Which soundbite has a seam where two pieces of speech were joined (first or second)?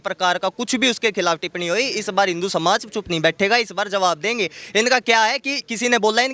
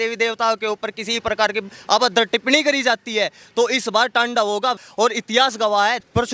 second